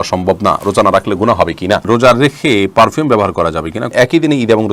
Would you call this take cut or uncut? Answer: cut